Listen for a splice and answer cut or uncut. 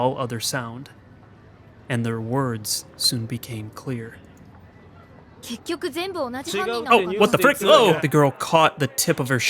cut